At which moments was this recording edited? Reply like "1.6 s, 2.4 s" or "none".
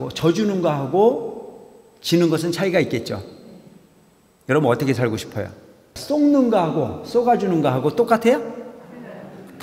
6.0 s